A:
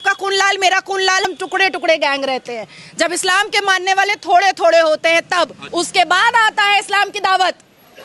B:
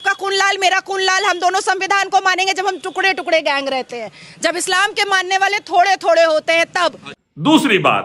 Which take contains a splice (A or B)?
A